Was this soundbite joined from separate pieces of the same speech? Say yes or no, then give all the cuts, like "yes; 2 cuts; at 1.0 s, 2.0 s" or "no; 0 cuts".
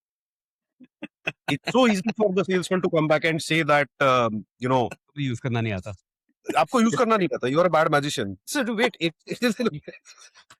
no; 0 cuts